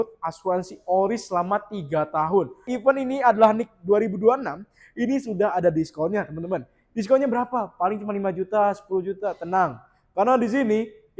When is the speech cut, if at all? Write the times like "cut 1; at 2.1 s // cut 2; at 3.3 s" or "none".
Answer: cut 1; at 2.7 s